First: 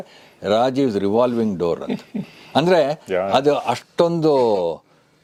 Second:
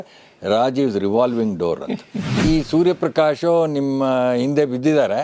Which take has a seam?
second; 1 cut; at 2.4 s

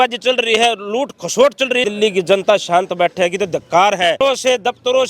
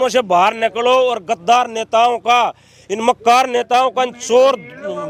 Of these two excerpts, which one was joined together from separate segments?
first; 2 cuts; at 1.9 s, 4.2 s

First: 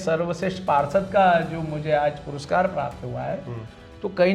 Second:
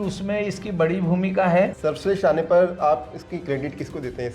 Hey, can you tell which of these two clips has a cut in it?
second; 1 cut; at 1.8 s

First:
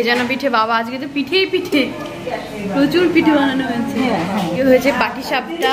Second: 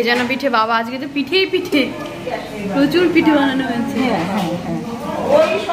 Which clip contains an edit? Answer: first; 1 cut; at 4.6 s

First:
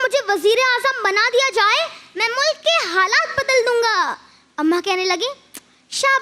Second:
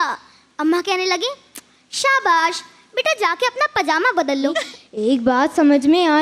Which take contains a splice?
second; 1 cut; at 4.7 s

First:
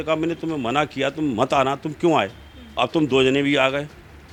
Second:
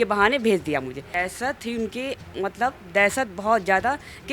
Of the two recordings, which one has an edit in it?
second; 1 cut; at 1.1 s

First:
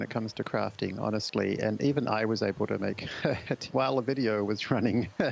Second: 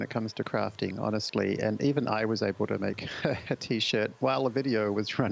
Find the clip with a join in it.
first; 1 cut; at 3.6 s

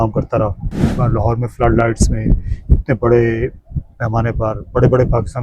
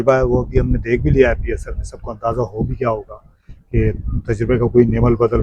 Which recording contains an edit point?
first; 1 cut; at 0.9 s

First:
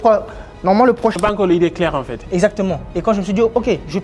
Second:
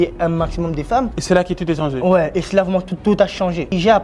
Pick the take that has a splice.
first; 1 cut; at 1.2 s

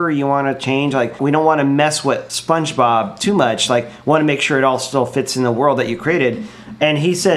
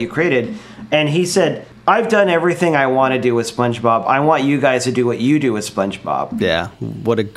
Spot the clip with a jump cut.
first; 1 cut; at 1.1 s

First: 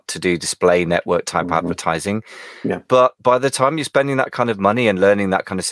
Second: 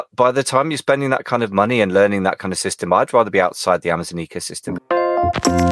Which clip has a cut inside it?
second; 1 cut; at 4.8 s

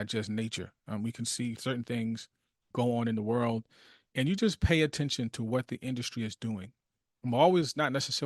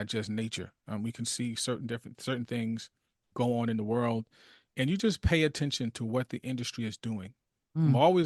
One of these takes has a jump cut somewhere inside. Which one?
first; 1 cut; at 1.6 s

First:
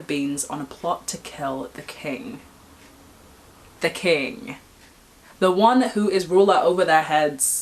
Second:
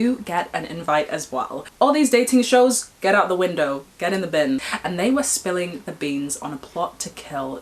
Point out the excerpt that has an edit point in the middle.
second; 2 cuts; at 1.6 s, 4.7 s

